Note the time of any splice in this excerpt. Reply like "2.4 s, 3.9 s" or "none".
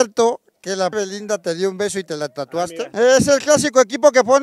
0.9 s, 2.9 s